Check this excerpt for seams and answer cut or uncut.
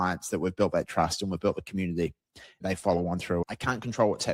cut